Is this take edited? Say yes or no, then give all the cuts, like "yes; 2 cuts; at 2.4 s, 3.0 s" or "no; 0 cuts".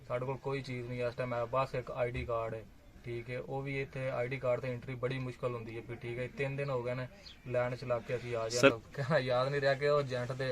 yes; 1 cut; at 8.7 s